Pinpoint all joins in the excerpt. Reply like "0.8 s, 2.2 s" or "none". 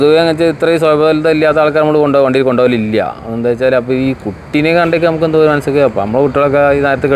none